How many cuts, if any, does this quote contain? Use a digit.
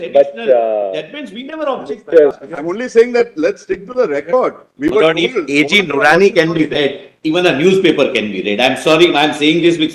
1